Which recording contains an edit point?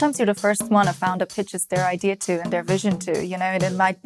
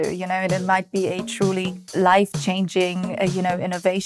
second; 1 cut; at 1.9 s

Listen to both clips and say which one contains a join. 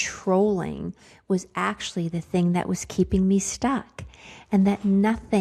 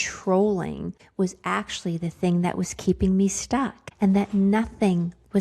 second; 2 cuts; at 1.0 s, 3.8 s

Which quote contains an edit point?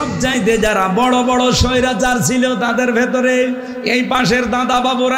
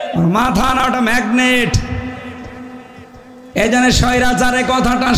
second; 1 cut; at 3.3 s

